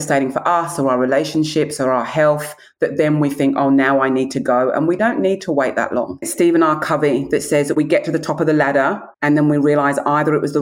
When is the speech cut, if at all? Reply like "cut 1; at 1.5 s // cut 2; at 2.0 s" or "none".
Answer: cut 1; at 5.0 s // cut 2; at 6.3 s // cut 3; at 9.1 s